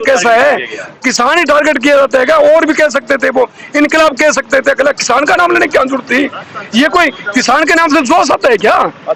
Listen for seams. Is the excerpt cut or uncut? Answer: uncut